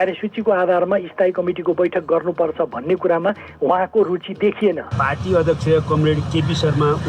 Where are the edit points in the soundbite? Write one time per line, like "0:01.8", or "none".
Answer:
0:04.9